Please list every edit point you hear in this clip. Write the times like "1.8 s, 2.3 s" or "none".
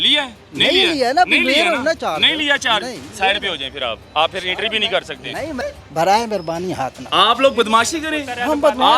5.6 s